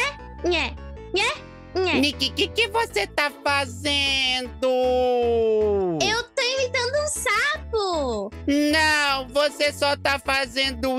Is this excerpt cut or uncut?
cut